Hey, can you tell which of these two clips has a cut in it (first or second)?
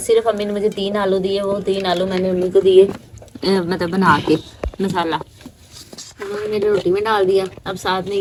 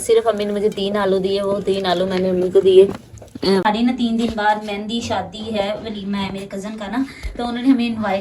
second